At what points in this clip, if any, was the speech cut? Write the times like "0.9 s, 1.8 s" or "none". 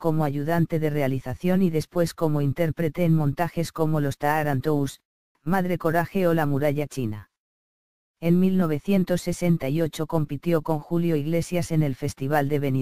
none